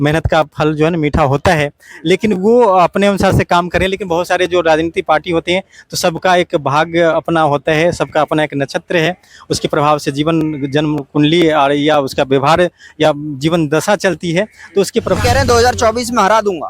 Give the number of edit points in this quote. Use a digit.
1